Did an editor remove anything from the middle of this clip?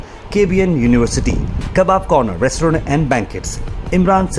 no; 0 cuts

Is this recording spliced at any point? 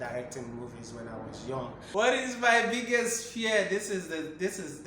yes; 1 cut; at 1.8 s

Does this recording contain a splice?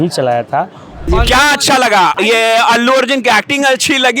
yes; 2 cuts; at 1.1 s, 2.2 s

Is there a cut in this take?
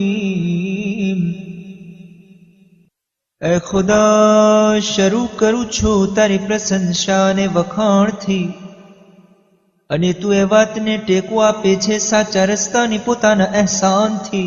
yes; 1 cut; at 1.2 s

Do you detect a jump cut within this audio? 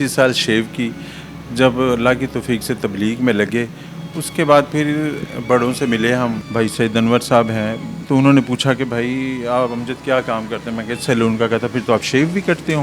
yes; 2 cuts; at 6.4 s, 7.9 s

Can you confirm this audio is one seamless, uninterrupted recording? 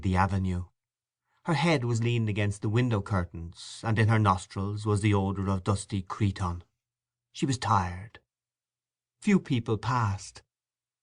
no; 1 cut; at 8.4 s

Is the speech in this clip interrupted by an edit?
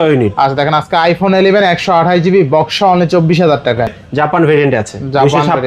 yes; 1 cut; at 4.0 s

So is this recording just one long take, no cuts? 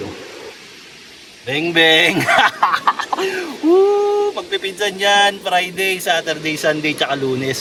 yes; 0 cuts

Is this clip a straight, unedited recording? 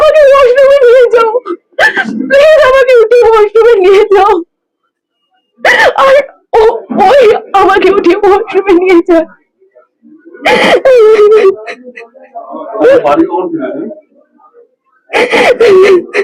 yes; 0 cuts

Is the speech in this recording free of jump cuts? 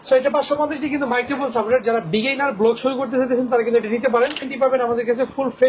no; 1 cut; at 4.5 s

